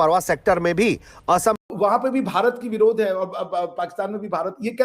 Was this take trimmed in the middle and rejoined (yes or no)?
yes